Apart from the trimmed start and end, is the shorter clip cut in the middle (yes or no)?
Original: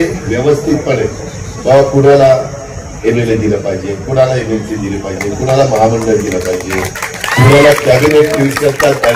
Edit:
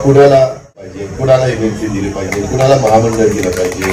yes